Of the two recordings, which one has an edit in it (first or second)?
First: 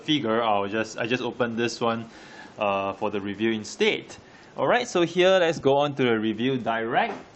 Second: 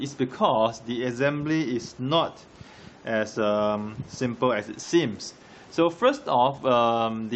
first